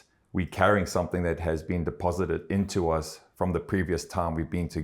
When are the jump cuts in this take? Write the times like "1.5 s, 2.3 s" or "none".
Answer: none